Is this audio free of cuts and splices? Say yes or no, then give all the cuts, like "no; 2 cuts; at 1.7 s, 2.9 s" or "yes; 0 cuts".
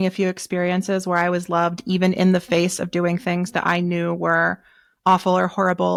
yes; 0 cuts